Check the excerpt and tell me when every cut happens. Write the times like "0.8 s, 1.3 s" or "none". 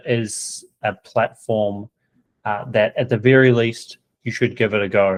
none